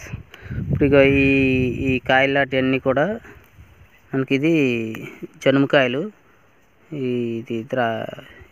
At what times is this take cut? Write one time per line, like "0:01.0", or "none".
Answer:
none